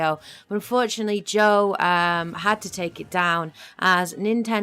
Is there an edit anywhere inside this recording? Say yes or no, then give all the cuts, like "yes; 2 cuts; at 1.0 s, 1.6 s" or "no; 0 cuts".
no; 0 cuts